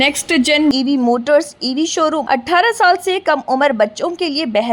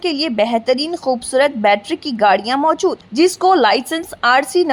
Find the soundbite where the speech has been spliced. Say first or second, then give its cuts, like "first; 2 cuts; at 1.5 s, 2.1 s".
first; 1 cut; at 2.2 s